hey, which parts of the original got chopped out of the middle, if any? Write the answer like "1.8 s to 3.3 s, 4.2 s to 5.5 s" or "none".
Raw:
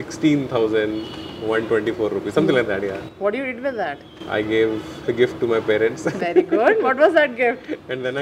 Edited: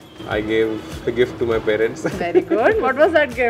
none